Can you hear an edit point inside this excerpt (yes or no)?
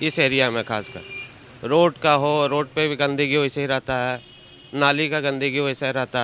no